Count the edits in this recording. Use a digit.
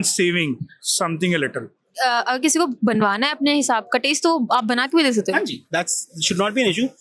1